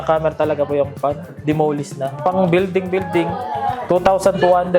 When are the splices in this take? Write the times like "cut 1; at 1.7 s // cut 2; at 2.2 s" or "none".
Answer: cut 1; at 2.1 s // cut 2; at 3.8 s